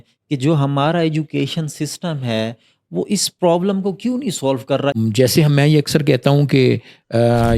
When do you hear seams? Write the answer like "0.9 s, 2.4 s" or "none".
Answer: 4.9 s